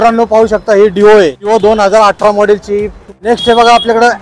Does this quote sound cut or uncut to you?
cut